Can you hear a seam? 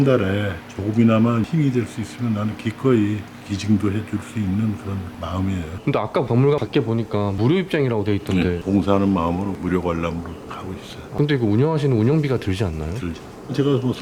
yes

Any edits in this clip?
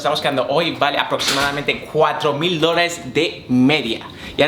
no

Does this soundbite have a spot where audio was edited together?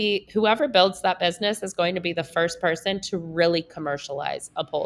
no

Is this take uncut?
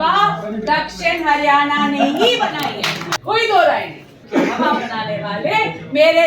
no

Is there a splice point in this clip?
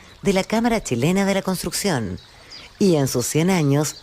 yes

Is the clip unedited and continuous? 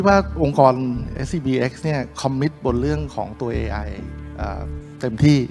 no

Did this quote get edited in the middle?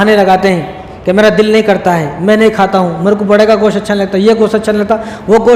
no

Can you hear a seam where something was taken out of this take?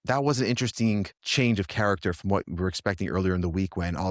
yes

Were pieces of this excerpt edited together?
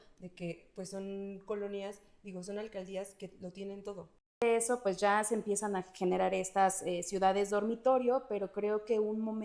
yes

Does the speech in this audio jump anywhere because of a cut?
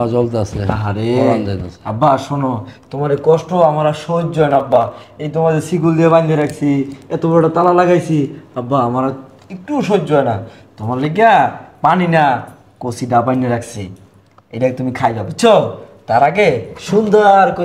no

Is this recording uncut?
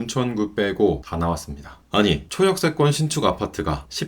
no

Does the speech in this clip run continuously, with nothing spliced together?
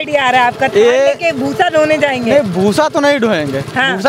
yes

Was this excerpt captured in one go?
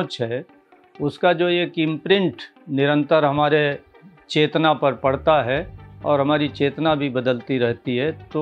yes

